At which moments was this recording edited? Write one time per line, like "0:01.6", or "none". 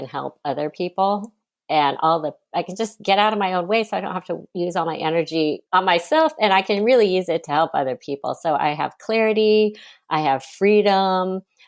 0:04.4
0:05.6